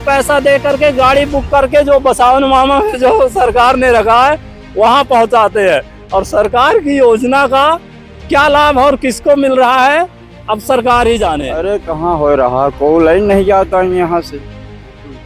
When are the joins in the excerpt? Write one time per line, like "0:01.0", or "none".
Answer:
0:11.9